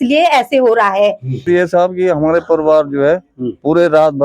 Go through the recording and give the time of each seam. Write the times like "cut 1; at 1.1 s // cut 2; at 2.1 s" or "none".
cut 1; at 1.4 s